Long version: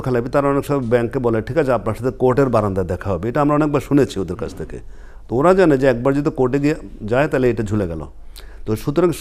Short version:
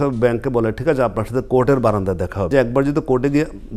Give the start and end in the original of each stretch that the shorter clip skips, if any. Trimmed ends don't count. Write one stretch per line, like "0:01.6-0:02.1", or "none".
0:03.2-0:05.8